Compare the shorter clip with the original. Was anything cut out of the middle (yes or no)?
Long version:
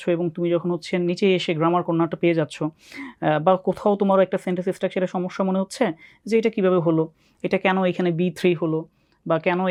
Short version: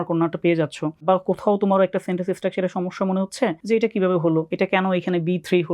yes